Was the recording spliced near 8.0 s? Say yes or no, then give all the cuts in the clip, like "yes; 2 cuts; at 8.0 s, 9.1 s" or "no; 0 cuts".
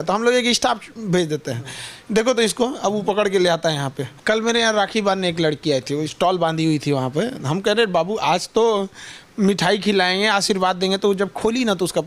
no; 1 cut; at 4.0 s